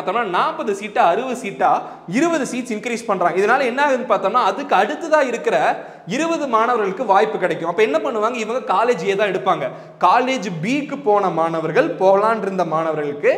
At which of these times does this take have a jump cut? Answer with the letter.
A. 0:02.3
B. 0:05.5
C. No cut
C